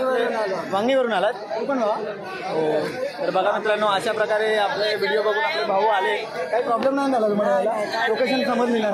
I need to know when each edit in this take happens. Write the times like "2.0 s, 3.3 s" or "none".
none